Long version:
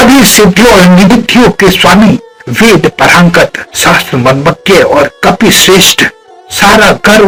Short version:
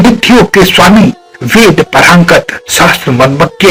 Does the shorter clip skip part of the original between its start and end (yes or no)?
no